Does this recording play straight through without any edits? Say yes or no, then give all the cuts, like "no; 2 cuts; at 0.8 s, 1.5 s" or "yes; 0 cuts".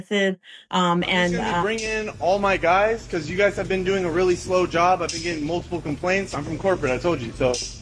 no; 1 cut; at 1.6 s